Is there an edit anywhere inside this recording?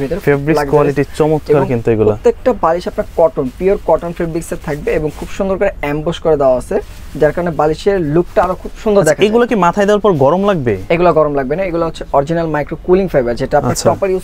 no; 0 cuts

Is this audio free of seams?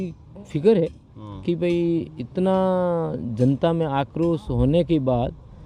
yes; 0 cuts

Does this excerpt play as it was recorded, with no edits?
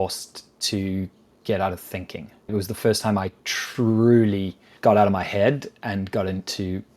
no; 1 cut; at 4.7 s

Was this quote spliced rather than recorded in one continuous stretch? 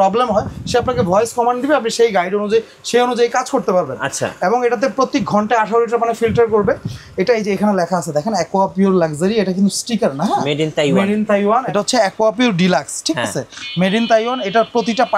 yes; 1 cut; at 11.7 s

